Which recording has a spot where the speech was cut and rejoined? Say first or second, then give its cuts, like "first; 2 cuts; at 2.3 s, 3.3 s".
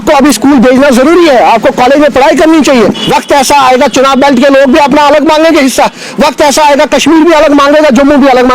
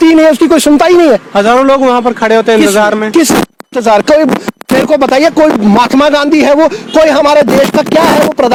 first; 1 cut; at 3.0 s